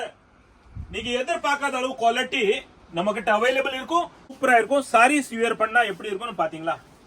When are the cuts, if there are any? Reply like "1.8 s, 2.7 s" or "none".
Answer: 4.3 s